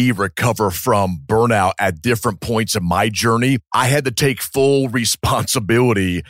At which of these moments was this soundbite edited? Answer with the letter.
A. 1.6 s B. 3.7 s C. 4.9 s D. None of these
B